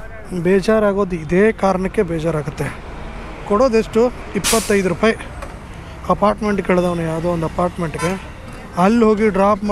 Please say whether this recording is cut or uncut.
uncut